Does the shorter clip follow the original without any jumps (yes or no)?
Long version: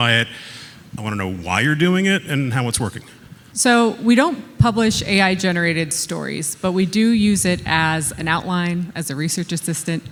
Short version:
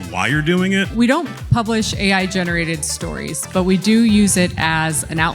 no